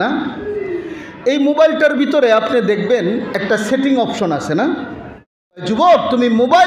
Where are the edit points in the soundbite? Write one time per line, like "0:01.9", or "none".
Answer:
0:05.7